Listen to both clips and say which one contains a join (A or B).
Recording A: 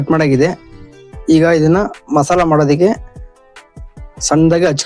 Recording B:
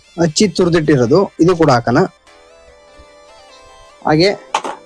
B